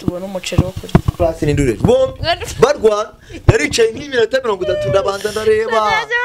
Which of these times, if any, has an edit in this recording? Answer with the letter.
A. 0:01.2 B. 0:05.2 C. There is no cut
A